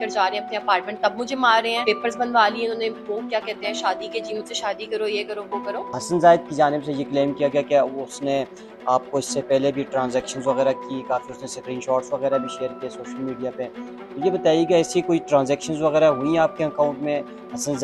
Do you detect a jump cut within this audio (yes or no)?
yes